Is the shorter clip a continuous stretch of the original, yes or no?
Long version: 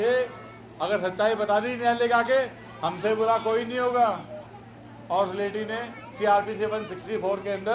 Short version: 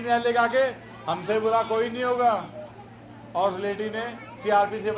yes